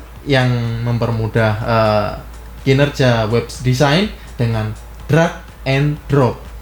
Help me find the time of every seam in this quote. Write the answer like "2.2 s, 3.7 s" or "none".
none